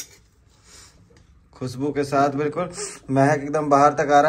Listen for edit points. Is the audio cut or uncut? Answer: uncut